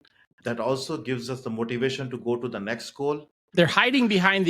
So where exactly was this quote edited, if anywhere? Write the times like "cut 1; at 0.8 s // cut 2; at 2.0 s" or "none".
cut 1; at 3.4 s